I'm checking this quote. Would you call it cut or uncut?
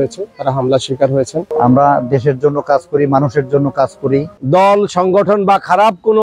cut